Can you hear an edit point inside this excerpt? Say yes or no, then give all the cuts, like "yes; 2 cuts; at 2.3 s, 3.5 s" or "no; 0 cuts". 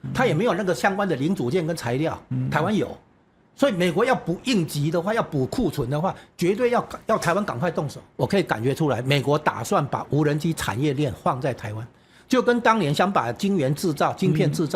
yes; 1 cut; at 8.0 s